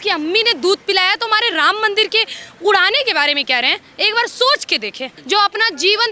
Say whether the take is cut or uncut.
cut